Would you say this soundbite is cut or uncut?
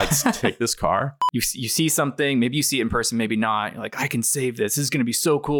cut